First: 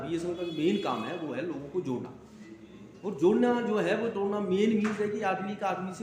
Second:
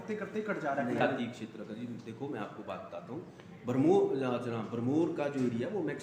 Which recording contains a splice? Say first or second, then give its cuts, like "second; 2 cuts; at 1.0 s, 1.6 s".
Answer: second; 1 cut; at 1.0 s